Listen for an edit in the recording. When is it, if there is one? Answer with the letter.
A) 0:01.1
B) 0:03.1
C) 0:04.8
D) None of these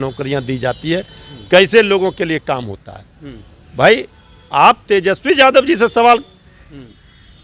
D